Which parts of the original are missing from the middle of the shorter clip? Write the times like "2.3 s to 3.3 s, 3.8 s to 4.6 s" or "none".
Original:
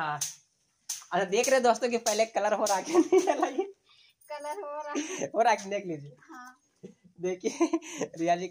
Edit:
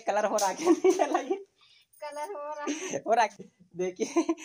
5.6 s to 6.8 s